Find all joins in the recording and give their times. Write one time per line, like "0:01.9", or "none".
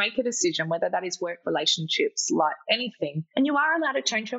0:03.2